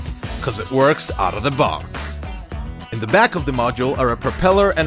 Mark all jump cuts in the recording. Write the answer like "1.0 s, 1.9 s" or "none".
none